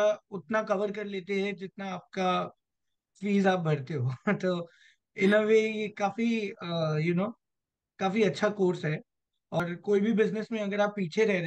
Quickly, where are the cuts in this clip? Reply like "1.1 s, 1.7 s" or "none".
9.6 s